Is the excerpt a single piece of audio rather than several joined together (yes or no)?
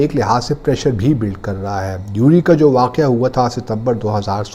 yes